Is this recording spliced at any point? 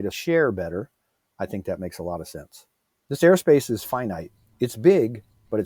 no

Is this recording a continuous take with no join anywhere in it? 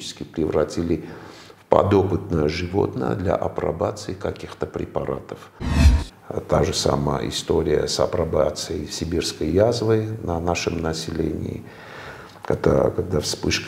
no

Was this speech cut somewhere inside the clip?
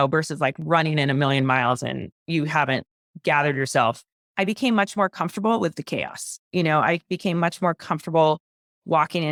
no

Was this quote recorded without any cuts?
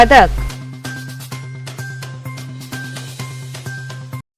yes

